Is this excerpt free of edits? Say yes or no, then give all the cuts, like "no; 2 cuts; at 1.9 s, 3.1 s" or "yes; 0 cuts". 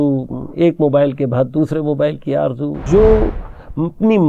no; 1 cut; at 2.7 s